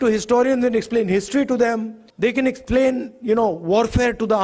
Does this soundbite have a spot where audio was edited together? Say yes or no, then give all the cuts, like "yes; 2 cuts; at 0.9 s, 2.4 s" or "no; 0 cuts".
yes; 1 cut; at 2.0 s